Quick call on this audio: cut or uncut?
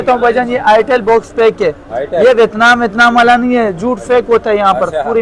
uncut